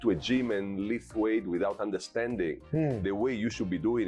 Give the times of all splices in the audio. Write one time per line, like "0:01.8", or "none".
none